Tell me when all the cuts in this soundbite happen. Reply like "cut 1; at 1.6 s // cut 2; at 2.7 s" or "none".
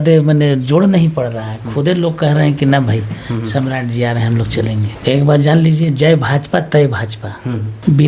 cut 1; at 4.9 s